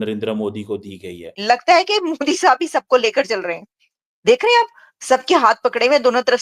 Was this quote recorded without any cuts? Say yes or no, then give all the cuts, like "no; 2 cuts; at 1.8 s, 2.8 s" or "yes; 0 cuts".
no; 1 cut; at 1.3 s